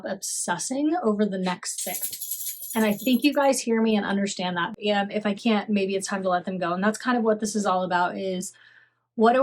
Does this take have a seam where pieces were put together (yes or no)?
yes